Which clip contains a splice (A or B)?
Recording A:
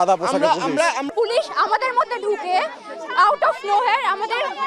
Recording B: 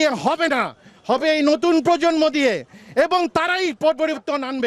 A